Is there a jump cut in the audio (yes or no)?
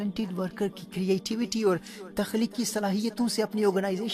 no